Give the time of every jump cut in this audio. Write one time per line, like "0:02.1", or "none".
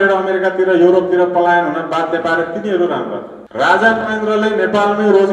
0:03.4